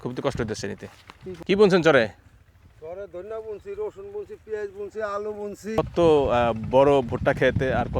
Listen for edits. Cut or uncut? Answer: cut